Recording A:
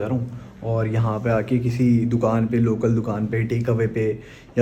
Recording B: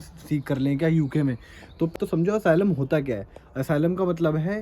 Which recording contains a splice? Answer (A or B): B